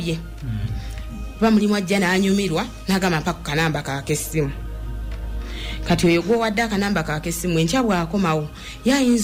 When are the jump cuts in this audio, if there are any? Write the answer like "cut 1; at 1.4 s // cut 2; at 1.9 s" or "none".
none